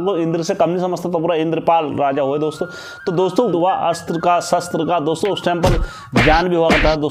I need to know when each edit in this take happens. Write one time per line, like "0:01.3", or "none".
0:03.5